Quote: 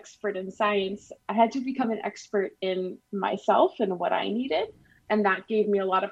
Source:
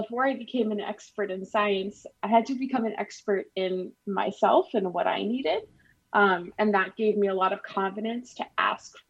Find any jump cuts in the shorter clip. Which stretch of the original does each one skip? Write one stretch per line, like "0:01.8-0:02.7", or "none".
0:05.9-0:06.5